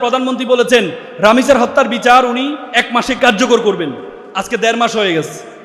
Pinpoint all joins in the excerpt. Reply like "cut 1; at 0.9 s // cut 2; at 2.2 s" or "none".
cut 1; at 1.0 s // cut 2; at 3.2 s